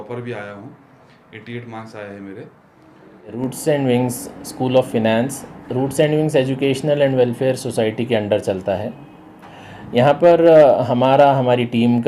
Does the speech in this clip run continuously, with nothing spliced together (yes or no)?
no